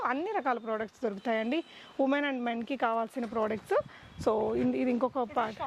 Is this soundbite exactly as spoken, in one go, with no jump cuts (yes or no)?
yes